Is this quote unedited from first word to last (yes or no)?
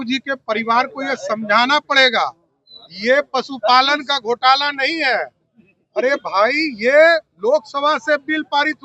yes